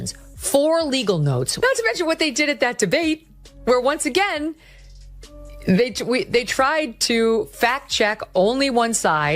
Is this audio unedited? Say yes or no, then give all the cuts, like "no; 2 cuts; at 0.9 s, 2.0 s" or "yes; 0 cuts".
no; 1 cut; at 1.5 s